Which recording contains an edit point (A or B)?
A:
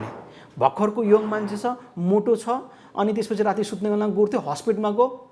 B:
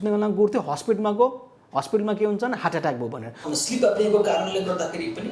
B